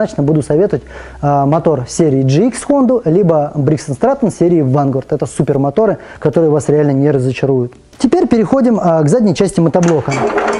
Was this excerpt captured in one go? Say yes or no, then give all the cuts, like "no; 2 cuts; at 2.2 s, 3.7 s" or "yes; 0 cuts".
yes; 0 cuts